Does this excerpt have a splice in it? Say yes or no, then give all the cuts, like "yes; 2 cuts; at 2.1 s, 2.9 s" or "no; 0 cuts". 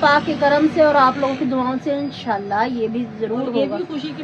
no; 0 cuts